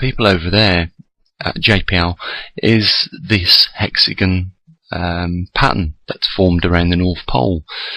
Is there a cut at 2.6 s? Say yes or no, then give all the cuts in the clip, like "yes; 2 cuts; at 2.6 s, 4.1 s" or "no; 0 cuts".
yes; 1 cut; at 2.6 s